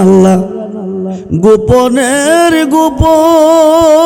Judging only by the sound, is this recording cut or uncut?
uncut